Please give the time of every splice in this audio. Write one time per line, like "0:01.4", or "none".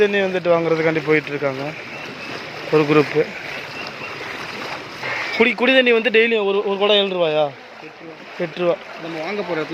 0:05.0

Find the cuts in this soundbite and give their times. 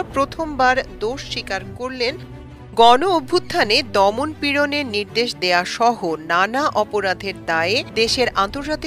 0:02.2

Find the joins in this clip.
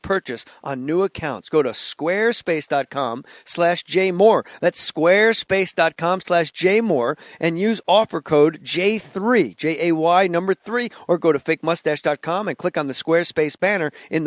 0:06.2

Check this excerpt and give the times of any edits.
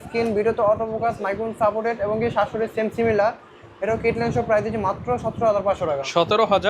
none

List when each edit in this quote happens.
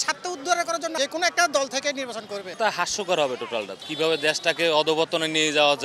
0:01.0
0:02.4
0:03.8

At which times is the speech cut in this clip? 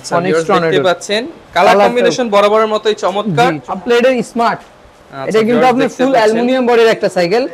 0:03.7

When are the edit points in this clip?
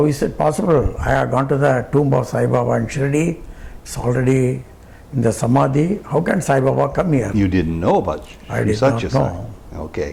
none

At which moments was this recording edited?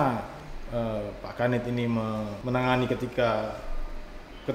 0:02.4

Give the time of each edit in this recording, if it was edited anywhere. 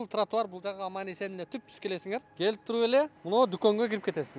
0:02.3
0:03.2

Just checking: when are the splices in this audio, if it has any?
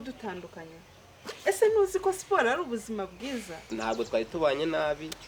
0:03.6

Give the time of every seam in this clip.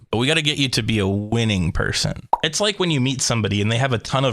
0:02.3

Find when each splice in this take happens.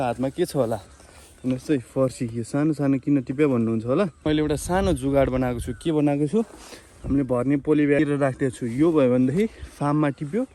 0:04.3
0:08.0

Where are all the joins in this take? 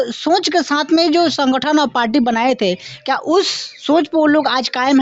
none

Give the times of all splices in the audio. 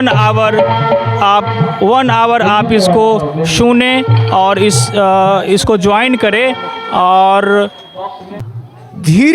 0:08.4

